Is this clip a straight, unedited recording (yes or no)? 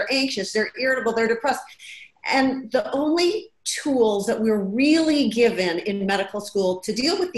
yes